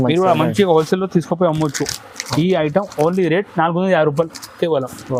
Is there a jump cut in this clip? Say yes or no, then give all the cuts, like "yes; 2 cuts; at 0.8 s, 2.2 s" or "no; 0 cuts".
no; 0 cuts